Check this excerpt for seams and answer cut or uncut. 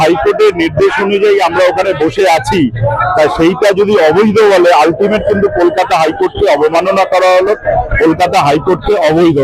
uncut